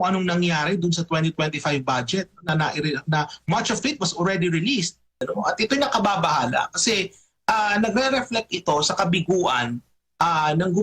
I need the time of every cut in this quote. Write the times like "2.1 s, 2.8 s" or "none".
5.2 s